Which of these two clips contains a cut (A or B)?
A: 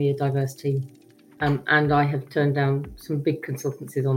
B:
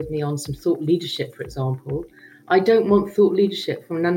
A